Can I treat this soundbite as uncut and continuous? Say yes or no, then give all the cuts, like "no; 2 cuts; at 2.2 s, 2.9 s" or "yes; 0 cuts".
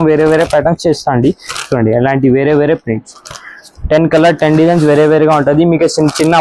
yes; 0 cuts